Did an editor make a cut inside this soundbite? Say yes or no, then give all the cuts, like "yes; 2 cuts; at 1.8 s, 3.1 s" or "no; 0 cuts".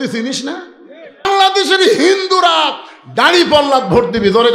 yes; 1 cut; at 1.3 s